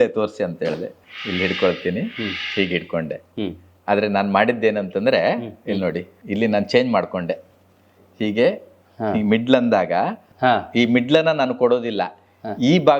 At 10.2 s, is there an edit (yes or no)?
yes